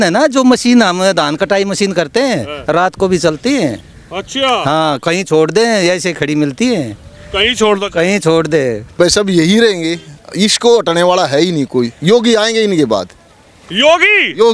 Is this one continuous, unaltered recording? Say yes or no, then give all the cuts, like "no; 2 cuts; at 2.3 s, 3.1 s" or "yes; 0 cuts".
no; 1 cut; at 8.8 s